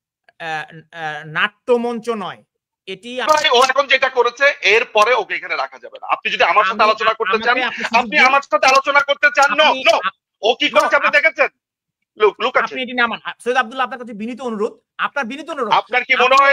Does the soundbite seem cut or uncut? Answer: cut